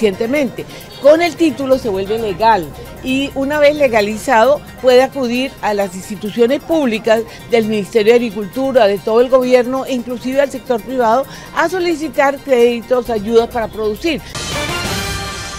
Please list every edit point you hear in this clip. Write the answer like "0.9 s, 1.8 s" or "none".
14.3 s